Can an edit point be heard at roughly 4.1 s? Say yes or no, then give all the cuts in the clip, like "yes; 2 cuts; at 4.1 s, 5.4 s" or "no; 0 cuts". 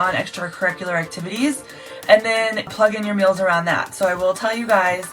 no; 1 cut; at 2.7 s